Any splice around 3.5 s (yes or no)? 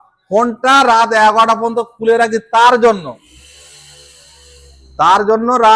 no